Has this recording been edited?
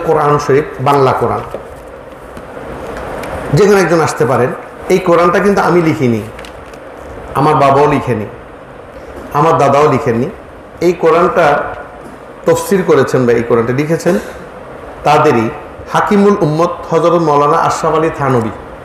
yes; 1 cut; at 4.7 s

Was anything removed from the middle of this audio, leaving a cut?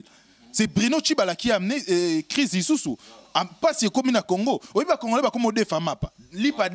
no; 0 cuts

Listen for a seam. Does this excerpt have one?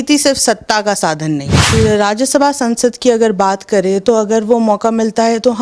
yes; 1 cut; at 1.6 s

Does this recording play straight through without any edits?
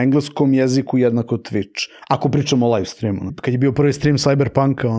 no; 1 cut; at 3.3 s

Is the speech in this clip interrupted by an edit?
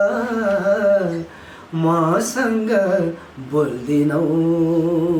no; 0 cuts

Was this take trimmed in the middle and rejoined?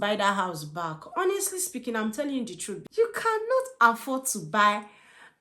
yes; 1 cut; at 2.8 s

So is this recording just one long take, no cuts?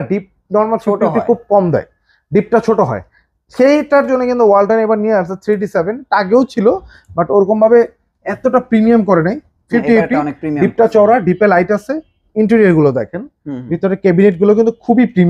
yes; 0 cuts

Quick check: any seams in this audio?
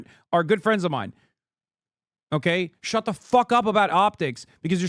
no; 0 cuts

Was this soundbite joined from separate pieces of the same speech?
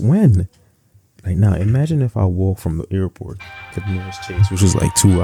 no; 0 cuts

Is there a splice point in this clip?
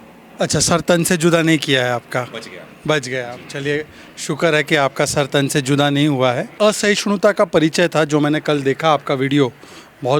yes; 1 cut; at 6.5 s

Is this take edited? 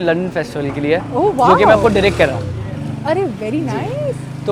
no; 0 cuts

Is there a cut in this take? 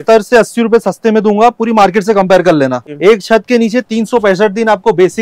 yes; 1 cut; at 2.8 s

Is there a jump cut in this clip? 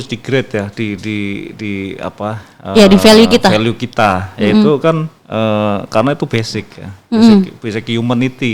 no; 0 cuts

